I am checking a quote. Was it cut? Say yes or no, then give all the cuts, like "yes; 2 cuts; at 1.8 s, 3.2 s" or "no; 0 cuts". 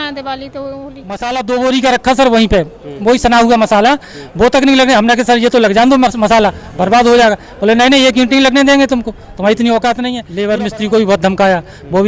yes; 2 cuts; at 1.1 s, 10.2 s